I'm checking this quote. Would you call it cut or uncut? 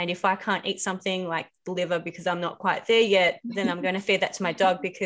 cut